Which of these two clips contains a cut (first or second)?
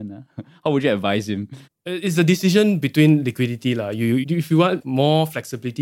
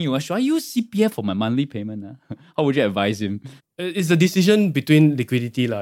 first